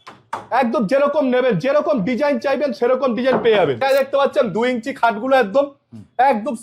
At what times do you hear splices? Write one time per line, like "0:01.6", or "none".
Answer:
0:03.8